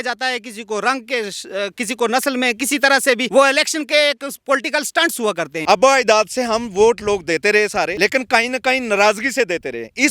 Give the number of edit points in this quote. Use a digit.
3